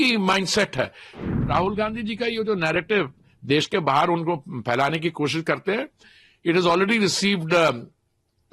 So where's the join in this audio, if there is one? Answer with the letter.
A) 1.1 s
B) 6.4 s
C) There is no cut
A